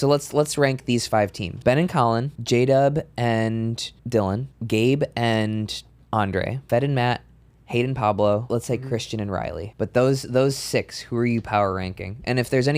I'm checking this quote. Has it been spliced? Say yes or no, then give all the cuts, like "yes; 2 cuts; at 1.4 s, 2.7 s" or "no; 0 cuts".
yes; 7 cuts; at 1.5 s, 2.3 s, 3.9 s, 4.5 s, 6.6 s, 8.5 s, 9.6 s